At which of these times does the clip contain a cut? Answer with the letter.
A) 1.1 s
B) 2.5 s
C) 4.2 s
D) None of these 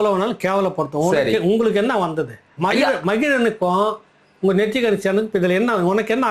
D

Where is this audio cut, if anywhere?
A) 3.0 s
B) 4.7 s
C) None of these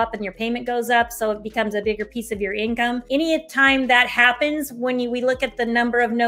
A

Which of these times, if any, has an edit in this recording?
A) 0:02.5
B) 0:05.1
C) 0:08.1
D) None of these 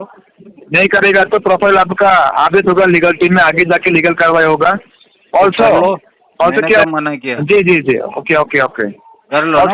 D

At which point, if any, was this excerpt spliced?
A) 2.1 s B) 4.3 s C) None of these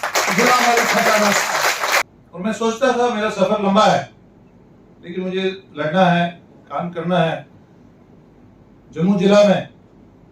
A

